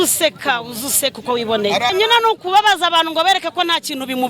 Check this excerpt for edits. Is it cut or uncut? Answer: cut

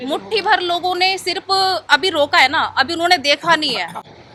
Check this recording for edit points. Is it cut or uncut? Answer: uncut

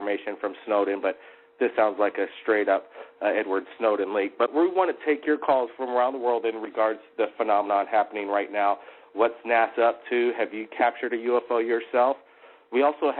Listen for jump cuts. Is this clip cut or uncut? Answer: cut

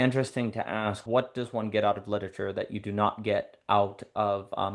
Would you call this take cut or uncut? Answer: cut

